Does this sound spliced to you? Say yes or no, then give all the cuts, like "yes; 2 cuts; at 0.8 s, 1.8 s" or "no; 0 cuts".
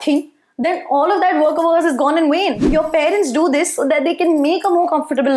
yes; 1 cut; at 2.6 s